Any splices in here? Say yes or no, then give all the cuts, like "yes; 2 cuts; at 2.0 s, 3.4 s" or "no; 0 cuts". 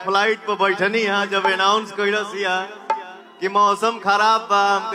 no; 0 cuts